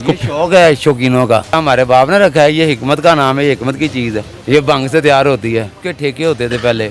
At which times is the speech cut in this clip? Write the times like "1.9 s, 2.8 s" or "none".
1.6 s, 4.3 s, 5.8 s